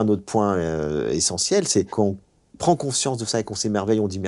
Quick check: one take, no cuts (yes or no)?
no